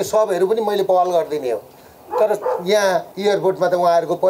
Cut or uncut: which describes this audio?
cut